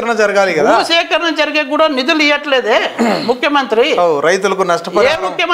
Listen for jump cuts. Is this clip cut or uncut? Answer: uncut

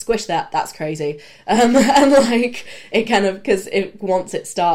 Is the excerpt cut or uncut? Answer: uncut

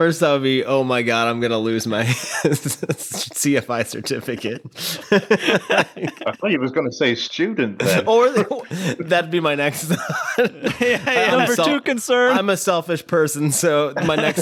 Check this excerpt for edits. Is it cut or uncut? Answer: uncut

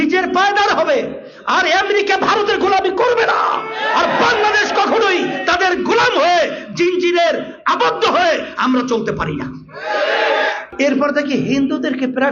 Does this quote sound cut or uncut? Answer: cut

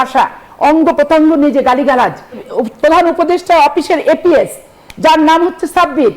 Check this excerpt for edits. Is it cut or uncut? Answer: cut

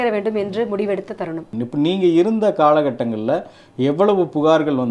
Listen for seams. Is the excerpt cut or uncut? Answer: cut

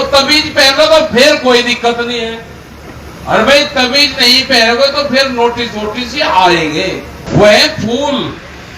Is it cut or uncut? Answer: cut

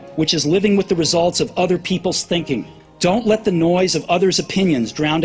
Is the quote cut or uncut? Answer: cut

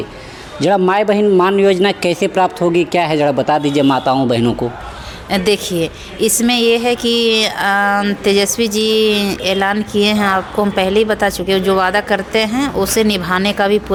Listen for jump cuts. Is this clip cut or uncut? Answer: uncut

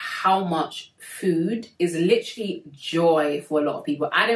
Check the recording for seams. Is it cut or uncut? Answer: uncut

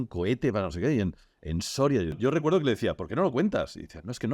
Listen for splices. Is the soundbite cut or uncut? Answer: cut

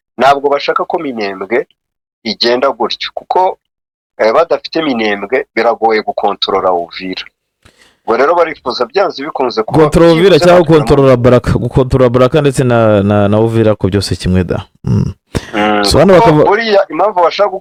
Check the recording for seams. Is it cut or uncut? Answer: uncut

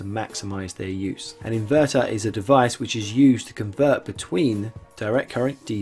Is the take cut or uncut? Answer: cut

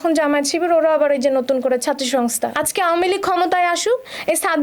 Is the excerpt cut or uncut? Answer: cut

